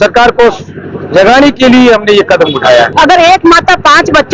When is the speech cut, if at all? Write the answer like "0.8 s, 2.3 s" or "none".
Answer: 2.9 s